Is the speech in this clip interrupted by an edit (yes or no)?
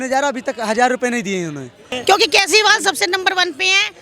yes